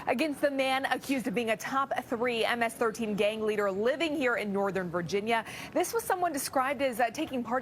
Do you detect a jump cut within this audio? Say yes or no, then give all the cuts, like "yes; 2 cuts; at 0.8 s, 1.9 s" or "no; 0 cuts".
no; 0 cuts